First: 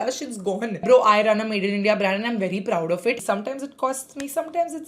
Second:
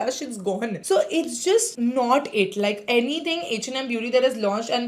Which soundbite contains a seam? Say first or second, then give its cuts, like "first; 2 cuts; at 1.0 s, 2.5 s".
first; 2 cuts; at 0.8 s, 3.2 s